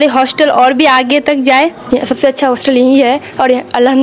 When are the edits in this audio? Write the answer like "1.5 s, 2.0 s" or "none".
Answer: 1.8 s